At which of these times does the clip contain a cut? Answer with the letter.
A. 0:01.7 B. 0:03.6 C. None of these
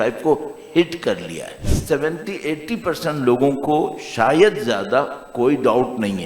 A